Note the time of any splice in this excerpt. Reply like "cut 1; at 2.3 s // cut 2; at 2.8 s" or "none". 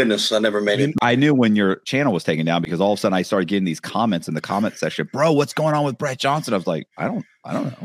cut 1; at 0.9 s // cut 2; at 1.8 s